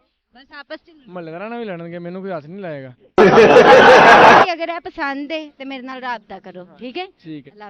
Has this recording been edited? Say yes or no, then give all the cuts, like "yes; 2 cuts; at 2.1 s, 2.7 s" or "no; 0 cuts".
yes; 1 cut; at 4.4 s